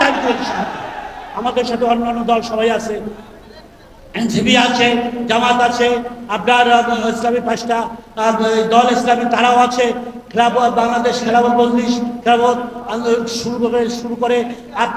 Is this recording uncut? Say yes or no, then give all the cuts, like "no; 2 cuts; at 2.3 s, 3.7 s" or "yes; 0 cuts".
yes; 0 cuts